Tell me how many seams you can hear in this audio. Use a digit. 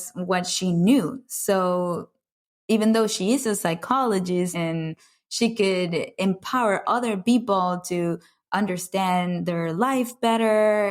1